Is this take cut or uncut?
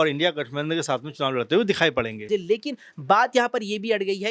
cut